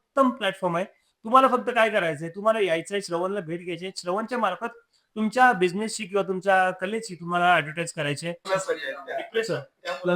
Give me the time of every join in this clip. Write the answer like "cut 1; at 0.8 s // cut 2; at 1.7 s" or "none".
cut 1; at 8.4 s